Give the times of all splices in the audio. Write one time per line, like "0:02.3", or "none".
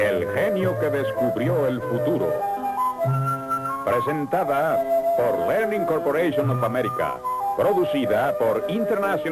none

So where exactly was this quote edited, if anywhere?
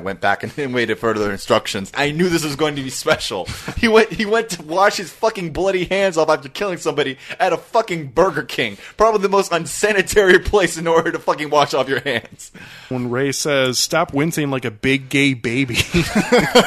0:01.9
0:12.9

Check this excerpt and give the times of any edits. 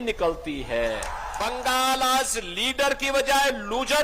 0:01.5

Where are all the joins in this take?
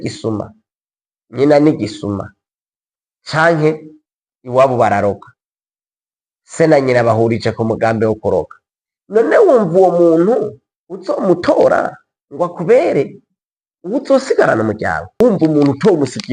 0:15.1

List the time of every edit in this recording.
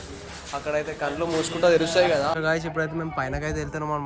0:02.3

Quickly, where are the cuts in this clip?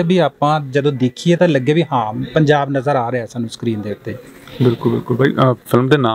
none

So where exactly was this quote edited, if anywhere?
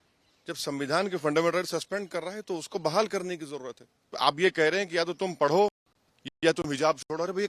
0:04.0

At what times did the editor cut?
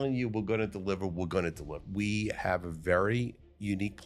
0:01.8

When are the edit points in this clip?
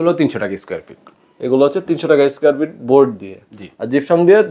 none

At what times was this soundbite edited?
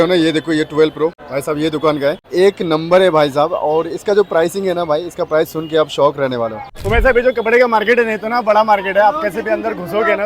0:01.3
0:02.2
0:06.7

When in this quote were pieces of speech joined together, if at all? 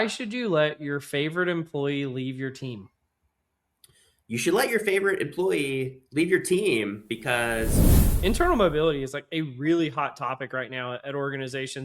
0:08.0

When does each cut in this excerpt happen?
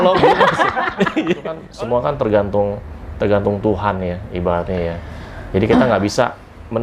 0:01.7

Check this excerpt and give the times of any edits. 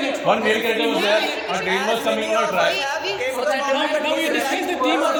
none

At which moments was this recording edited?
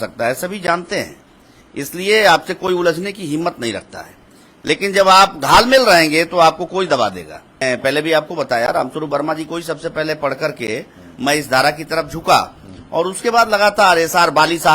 0:07.6

